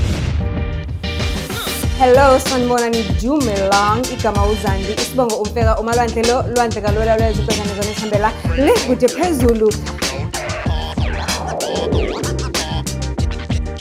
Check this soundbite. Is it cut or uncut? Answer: uncut